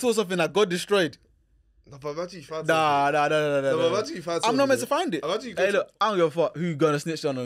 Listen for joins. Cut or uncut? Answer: cut